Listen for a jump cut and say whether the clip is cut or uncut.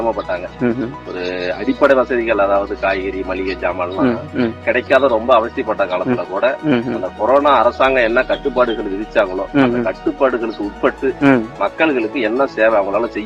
uncut